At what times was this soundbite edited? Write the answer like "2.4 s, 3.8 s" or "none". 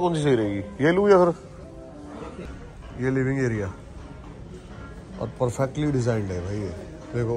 2.5 s